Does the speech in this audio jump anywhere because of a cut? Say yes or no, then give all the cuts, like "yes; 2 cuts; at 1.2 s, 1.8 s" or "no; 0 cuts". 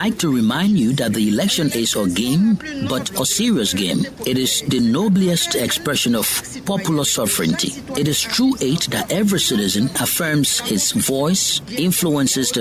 yes; 1 cut; at 10.0 s